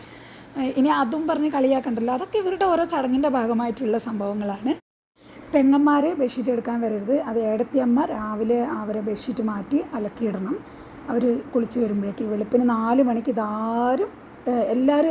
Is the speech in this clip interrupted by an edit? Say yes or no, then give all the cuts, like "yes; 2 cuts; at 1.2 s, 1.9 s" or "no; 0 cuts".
no; 0 cuts